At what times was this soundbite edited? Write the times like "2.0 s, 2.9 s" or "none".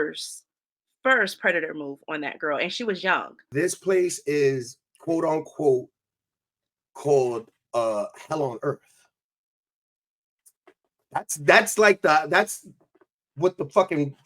3.4 s